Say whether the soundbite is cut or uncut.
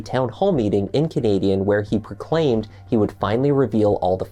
uncut